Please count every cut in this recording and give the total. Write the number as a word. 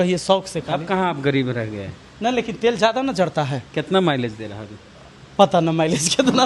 zero